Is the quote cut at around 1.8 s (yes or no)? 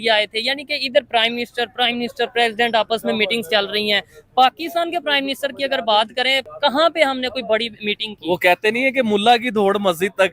no